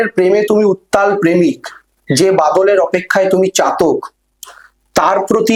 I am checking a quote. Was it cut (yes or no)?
no